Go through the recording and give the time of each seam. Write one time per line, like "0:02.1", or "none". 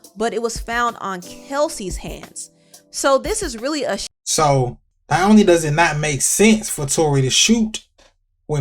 0:04.2
0:04.9